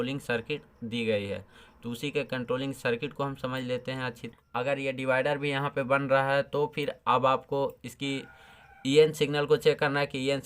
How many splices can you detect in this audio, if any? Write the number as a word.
one